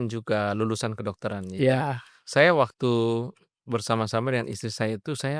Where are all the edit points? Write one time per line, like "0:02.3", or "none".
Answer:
none